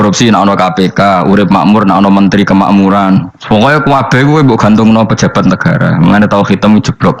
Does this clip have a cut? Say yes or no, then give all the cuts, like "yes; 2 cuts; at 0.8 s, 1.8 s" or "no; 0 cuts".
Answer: no; 0 cuts